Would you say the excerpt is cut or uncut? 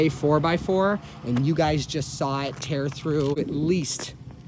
cut